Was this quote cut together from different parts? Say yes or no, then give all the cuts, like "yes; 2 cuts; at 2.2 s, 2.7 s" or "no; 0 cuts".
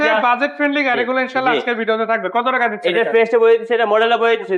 no; 0 cuts